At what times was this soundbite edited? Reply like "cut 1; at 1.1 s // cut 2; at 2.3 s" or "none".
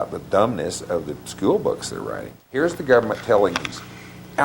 cut 1; at 2.4 s